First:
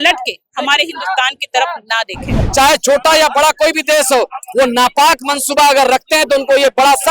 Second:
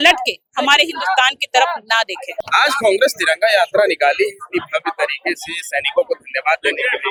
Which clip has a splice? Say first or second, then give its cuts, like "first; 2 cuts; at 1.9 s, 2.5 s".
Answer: first; 1 cut; at 2.4 s